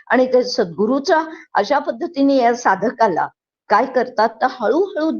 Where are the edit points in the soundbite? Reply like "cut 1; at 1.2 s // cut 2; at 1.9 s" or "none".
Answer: none